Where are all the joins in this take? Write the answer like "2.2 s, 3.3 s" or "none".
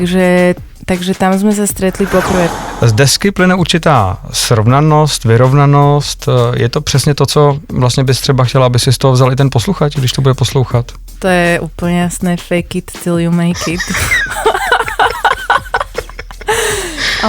2.5 s

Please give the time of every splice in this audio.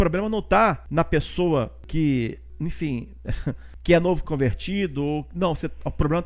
0.8 s, 1.8 s, 2.5 s, 3.7 s

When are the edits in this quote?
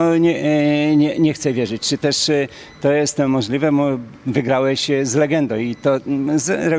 none

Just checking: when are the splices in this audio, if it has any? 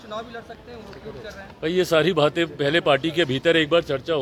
none

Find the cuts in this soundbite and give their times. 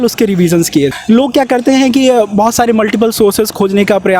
0.9 s

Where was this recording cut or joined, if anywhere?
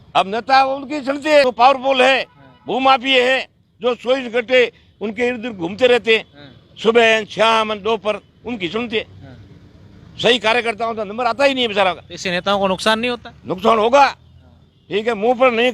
1.5 s

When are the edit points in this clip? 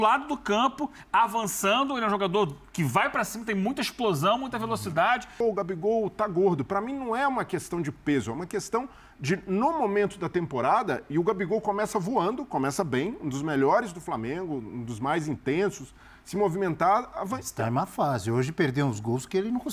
5.4 s

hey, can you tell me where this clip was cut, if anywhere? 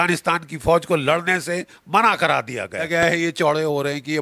2.9 s

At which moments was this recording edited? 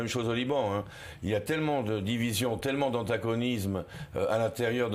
1.5 s

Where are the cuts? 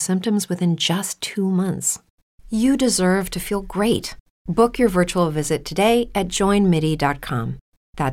1.1 s

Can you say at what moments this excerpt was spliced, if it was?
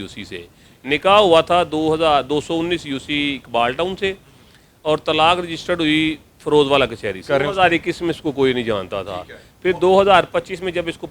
7.2 s

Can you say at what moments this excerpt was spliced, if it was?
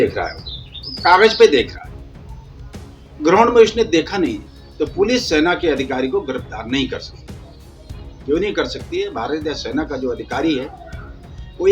4.4 s

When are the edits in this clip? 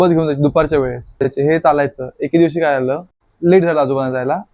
1.2 s, 3.3 s

